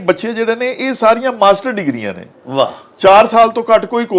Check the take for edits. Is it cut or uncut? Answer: uncut